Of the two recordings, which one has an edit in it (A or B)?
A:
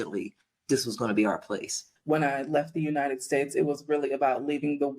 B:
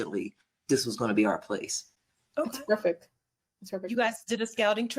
A